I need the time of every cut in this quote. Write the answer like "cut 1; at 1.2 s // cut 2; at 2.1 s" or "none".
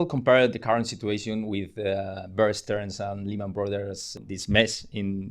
cut 1; at 4.2 s